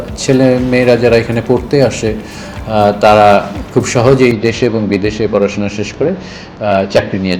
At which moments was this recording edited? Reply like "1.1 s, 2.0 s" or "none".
none